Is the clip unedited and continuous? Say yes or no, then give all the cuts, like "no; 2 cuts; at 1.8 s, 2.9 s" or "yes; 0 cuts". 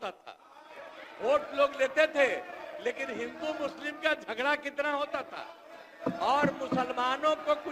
yes; 0 cuts